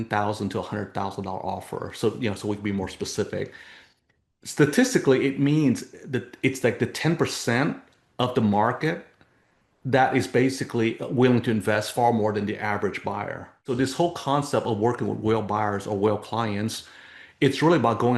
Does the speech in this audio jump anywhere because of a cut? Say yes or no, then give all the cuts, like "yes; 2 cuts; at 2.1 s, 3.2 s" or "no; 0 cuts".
yes; 1 cut; at 13.6 s